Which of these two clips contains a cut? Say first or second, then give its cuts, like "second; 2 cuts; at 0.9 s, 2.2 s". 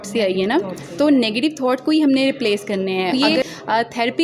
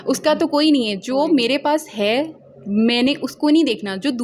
first; 1 cut; at 3.1 s